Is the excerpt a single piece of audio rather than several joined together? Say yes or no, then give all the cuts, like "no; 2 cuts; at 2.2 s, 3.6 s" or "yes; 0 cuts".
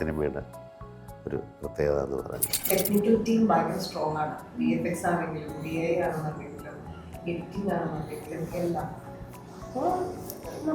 no; 1 cut; at 2.5 s